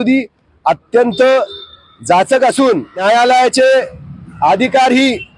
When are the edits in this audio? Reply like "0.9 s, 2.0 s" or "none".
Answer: 3.0 s